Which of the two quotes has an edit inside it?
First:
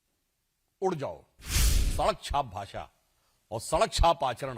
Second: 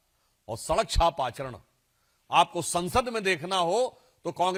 first; 1 cut; at 1.9 s

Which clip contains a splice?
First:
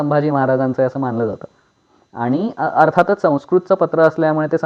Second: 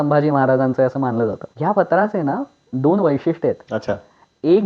second; 1 cut; at 1.5 s

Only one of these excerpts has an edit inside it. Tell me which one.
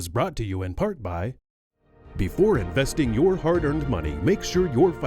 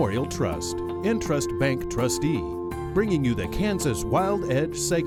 first; 1 cut; at 1.5 s

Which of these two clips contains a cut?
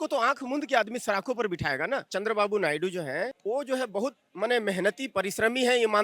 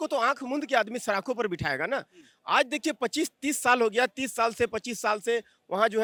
first; 2 cuts; at 2.1 s, 3.4 s

